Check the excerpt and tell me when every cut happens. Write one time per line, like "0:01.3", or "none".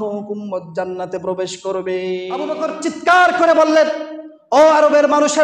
0:02.5